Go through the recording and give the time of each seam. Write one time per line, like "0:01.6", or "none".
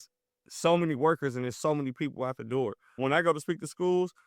0:02.9